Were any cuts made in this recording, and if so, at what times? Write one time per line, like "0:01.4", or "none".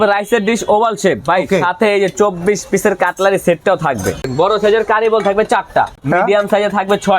0:04.2
0:06.0